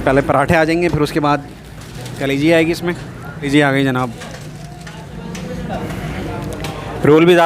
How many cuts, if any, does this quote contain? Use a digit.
2